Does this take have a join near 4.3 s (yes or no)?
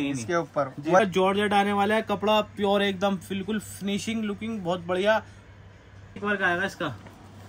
no